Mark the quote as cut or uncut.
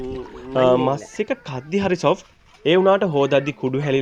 uncut